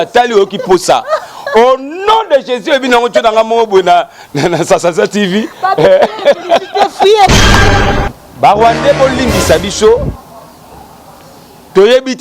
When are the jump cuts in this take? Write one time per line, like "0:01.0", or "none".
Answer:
0:07.7